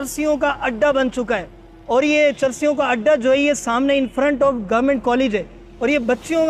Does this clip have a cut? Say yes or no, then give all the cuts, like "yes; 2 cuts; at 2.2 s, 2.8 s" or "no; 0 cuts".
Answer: no; 0 cuts